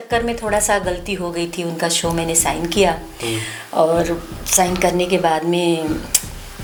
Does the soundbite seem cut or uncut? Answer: uncut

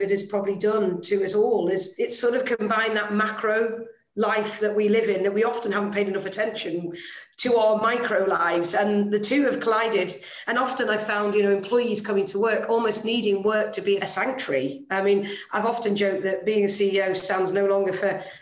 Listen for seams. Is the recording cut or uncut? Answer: cut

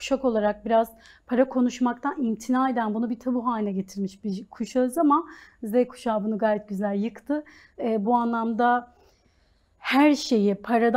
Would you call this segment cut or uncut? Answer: uncut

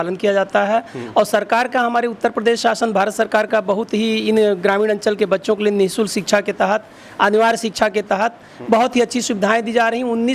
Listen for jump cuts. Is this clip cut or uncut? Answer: uncut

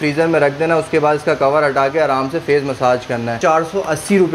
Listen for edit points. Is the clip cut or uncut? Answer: cut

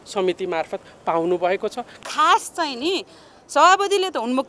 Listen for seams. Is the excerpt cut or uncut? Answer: cut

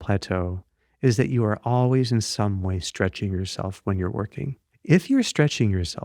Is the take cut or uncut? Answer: cut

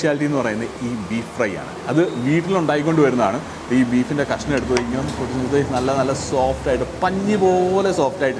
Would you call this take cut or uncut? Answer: uncut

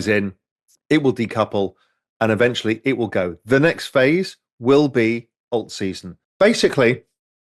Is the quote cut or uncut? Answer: cut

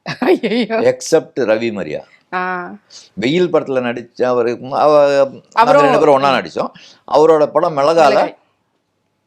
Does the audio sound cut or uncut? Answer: uncut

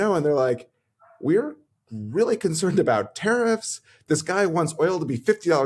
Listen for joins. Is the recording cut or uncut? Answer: uncut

